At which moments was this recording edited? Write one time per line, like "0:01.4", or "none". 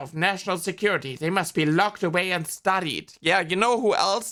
none